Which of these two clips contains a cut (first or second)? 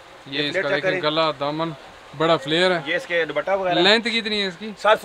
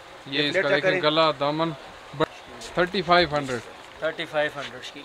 second